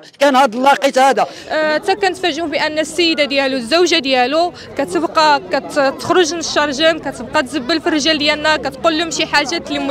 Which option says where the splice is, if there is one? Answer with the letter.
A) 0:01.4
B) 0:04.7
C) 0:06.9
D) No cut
A